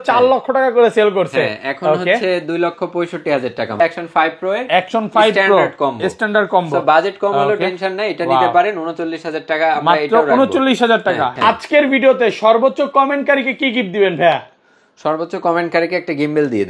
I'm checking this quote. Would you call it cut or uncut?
cut